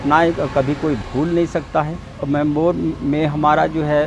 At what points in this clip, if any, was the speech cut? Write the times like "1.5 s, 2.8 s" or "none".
2.2 s